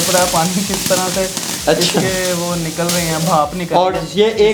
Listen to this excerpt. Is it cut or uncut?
uncut